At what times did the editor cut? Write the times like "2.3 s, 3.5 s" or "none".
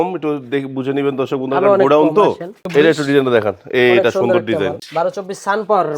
2.6 s, 4.8 s